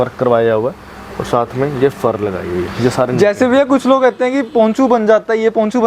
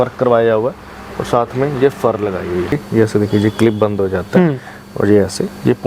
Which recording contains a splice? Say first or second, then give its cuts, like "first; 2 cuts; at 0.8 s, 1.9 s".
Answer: second; 1 cut; at 2.7 s